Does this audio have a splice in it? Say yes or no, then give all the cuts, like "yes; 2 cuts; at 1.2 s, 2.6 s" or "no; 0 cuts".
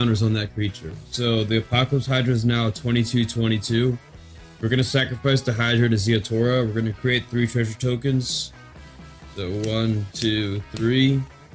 no; 0 cuts